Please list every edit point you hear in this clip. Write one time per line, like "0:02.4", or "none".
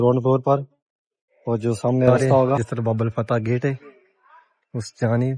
0:02.7